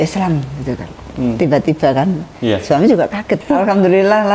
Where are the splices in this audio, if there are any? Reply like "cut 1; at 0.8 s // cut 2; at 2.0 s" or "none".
cut 1; at 3.4 s